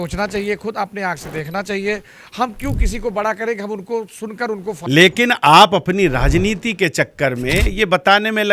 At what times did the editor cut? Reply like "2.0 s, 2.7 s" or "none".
4.7 s